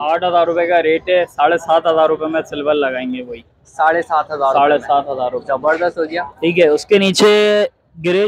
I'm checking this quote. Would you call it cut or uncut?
uncut